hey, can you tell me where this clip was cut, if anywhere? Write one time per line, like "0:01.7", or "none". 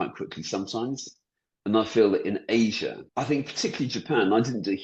0:03.0